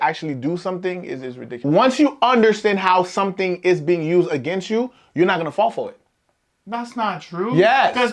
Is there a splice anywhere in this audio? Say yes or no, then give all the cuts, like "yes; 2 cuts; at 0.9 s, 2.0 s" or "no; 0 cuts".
yes; 1 cut; at 1.6 s